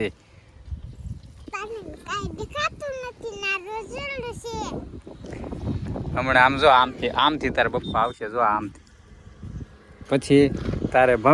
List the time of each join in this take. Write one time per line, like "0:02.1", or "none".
none

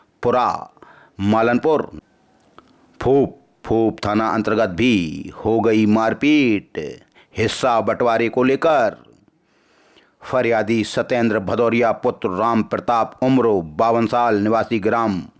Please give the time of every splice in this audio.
0:01.9

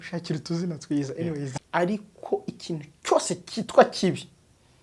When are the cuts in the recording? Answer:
0:01.5

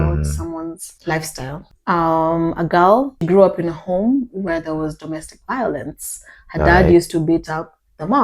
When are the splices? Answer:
0:00.9
0:01.6
0:03.2

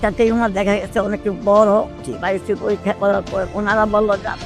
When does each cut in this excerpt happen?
0:01.9
0:03.5

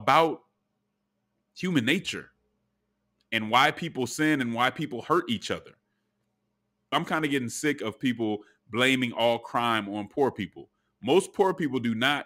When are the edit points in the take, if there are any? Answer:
0:06.9

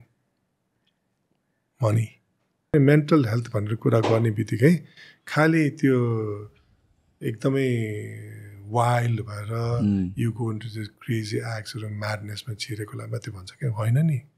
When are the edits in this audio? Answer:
0:02.7

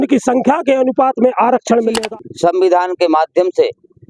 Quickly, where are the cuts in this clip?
0:02.0

